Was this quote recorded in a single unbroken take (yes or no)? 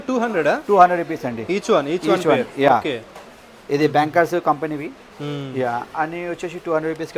yes